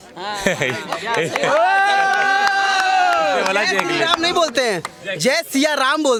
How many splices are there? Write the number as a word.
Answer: zero